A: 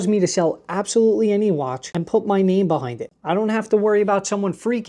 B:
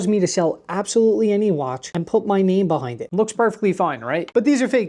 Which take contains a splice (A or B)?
B